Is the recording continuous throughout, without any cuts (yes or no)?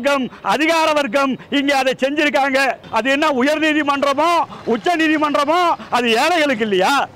no